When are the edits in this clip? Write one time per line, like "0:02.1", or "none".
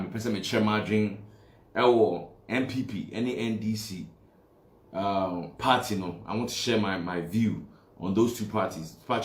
none